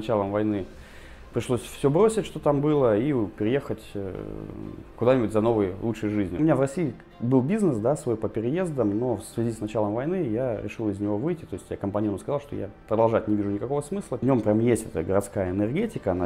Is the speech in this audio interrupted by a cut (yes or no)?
yes